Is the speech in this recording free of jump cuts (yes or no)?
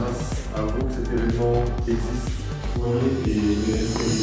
yes